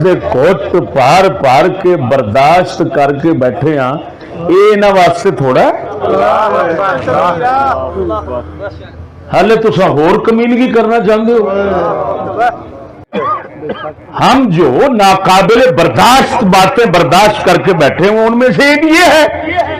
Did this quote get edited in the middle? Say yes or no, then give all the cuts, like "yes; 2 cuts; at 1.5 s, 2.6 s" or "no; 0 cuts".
yes; 1 cut; at 13.1 s